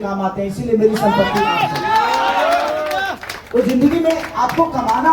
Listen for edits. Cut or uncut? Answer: uncut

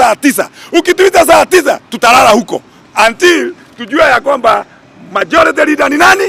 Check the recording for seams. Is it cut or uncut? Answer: uncut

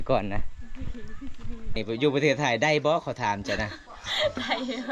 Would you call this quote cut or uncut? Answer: cut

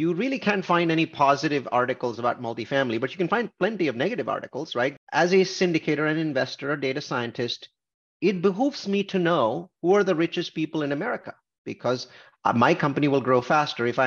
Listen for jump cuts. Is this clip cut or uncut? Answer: cut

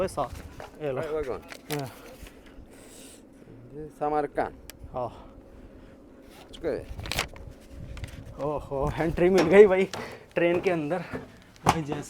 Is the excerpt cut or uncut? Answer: uncut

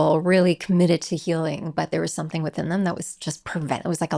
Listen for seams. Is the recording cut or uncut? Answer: uncut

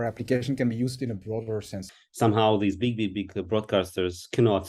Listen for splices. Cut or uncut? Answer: cut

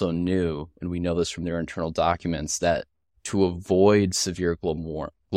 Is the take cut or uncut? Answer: uncut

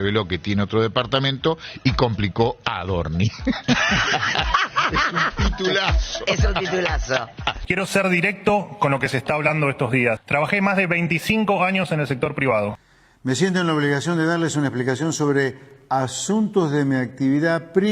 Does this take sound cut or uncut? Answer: cut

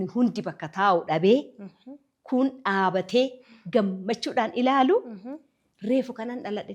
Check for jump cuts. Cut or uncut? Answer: uncut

